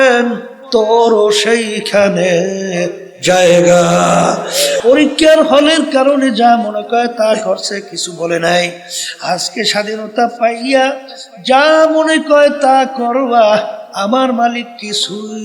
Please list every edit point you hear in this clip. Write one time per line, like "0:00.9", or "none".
0:04.8